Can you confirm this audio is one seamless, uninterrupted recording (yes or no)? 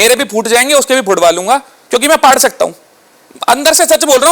no